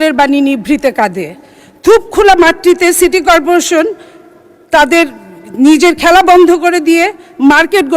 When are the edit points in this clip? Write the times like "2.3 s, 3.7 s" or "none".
none